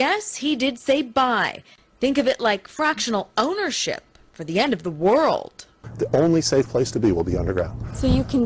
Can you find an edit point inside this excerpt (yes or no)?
yes